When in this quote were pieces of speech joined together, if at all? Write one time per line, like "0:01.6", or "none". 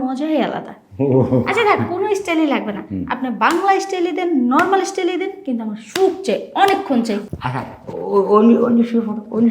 0:07.2